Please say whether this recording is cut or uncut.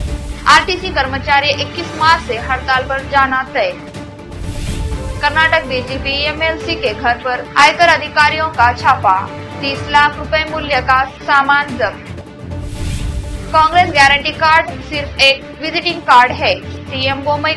uncut